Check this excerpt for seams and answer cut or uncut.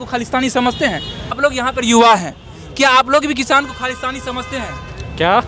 cut